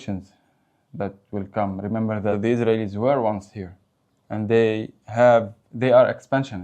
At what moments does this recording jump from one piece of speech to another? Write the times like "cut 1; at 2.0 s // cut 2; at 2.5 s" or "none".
cut 1; at 2.3 s